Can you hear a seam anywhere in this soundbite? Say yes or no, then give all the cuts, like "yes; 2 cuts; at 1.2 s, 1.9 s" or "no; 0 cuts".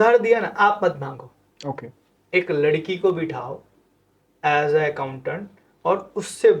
no; 0 cuts